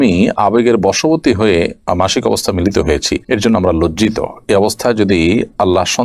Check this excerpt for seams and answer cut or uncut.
uncut